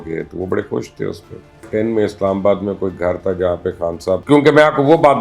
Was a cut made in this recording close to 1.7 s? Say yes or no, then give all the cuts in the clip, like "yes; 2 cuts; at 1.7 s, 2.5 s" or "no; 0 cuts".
yes; 2 cuts; at 1.7 s, 4.2 s